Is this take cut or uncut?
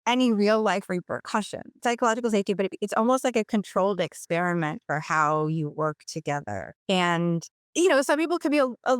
cut